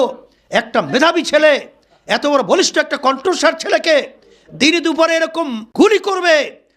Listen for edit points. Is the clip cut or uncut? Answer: cut